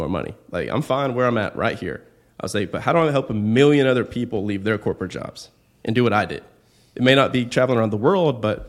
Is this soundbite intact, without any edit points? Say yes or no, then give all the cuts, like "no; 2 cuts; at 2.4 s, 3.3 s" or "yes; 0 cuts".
yes; 0 cuts